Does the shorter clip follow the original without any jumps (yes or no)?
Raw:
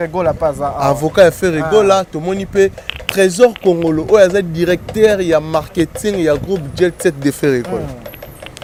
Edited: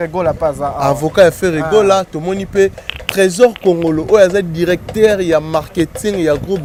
yes